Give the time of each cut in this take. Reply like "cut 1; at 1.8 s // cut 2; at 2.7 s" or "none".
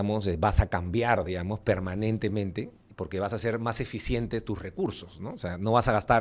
none